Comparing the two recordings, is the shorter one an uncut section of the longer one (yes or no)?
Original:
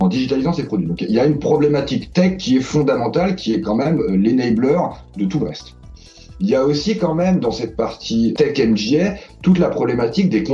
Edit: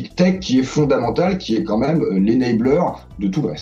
yes